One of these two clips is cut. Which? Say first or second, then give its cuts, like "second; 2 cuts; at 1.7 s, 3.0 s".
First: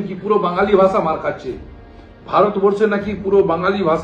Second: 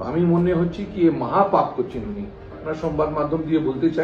second; 1 cut; at 2.7 s